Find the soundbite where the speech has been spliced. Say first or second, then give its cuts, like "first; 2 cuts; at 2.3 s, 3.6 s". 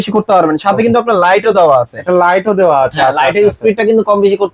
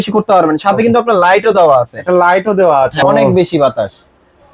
second; 1 cut; at 3.0 s